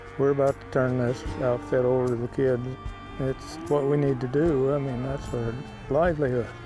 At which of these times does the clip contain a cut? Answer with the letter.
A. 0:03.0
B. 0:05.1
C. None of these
A